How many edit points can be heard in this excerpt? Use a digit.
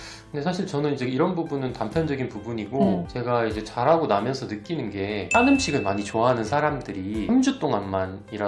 3